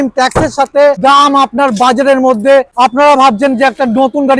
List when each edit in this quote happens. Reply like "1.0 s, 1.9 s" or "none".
1.0 s, 2.7 s